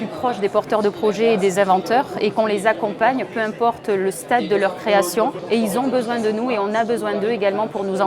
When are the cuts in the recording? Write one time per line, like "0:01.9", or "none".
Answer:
0:05.4